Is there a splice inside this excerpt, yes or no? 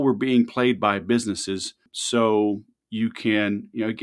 yes